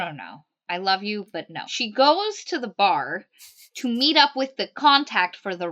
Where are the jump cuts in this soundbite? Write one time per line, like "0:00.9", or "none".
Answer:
0:01.6